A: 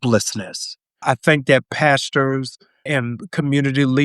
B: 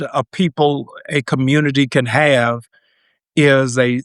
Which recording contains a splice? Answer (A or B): A